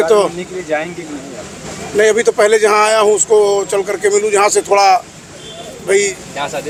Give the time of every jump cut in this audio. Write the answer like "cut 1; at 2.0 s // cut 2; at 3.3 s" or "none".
none